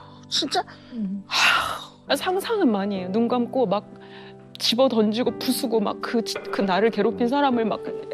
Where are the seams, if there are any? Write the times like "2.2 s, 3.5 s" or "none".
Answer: 1.9 s